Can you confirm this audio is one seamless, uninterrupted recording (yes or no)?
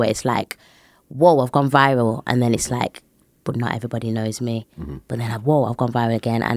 yes